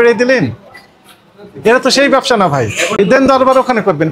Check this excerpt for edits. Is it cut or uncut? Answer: cut